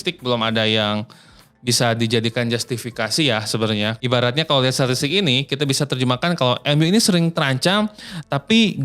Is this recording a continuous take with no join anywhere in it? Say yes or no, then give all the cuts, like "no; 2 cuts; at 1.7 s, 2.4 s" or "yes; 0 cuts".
no; 1 cut; at 4.0 s